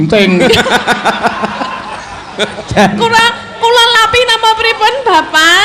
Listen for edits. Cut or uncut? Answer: cut